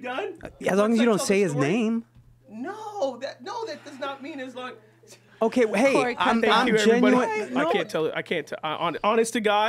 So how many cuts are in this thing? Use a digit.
1